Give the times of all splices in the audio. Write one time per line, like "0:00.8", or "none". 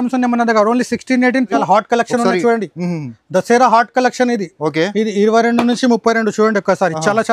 0:01.5